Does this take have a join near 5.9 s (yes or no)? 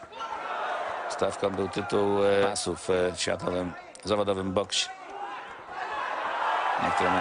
no